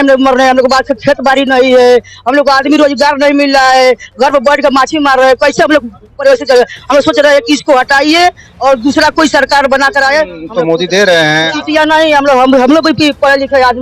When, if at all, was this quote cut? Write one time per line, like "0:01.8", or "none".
0:10.4
0:11.6